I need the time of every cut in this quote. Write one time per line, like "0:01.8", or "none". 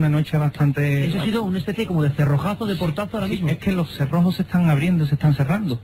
none

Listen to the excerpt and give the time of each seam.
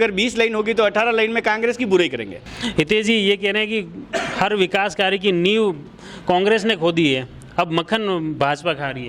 none

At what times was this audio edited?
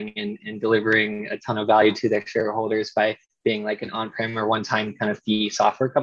none

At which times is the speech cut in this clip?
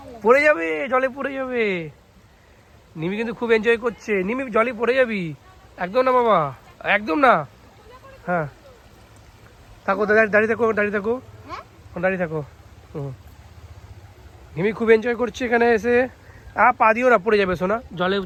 none

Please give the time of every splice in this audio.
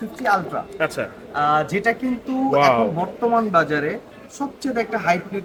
none

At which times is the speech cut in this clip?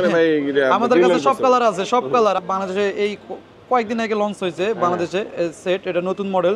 0:02.4

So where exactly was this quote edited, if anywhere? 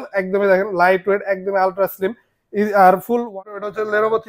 0:03.4

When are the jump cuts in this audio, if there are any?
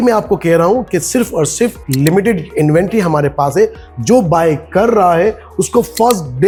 none

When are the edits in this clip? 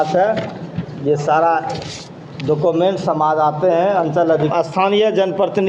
0:04.5

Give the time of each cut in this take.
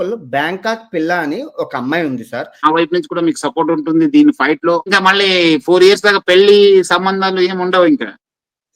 0:02.6
0:04.9

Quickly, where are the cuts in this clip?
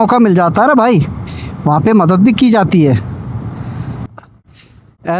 0:04.0

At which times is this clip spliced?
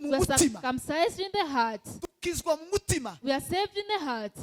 none

